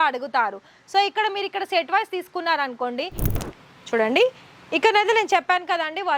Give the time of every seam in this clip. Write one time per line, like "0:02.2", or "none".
0:03.2

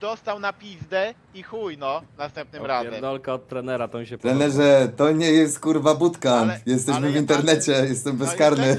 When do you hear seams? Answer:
none

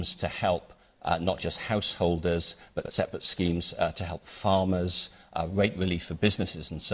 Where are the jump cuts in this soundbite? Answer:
none

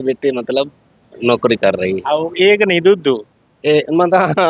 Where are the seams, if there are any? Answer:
none

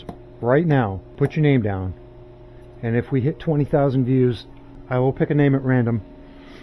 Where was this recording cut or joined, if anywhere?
0:01.0
0:04.7

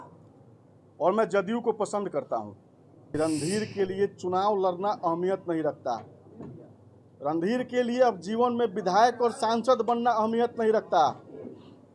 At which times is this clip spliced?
0:03.1

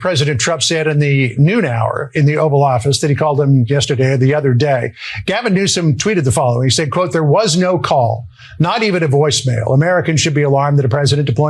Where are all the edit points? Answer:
none

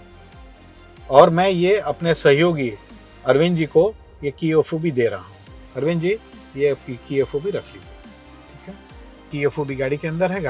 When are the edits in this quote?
0:09.3

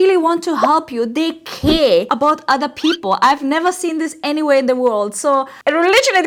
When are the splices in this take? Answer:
none

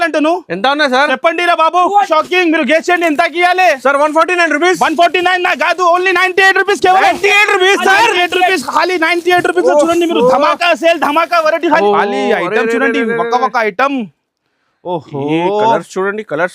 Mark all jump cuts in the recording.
0:02.1
0:11.8

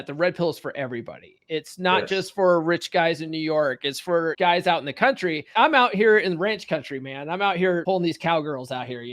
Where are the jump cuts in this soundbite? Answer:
0:04.3
0:05.5
0:07.8

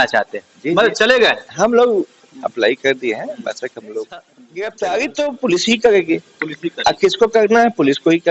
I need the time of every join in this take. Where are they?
0:04.4

